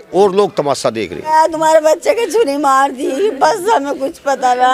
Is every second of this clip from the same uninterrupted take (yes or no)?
no